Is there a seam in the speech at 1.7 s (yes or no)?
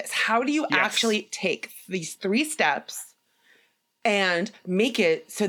no